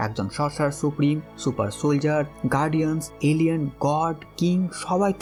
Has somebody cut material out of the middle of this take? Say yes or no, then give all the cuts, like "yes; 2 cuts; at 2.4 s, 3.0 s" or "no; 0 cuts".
no; 0 cuts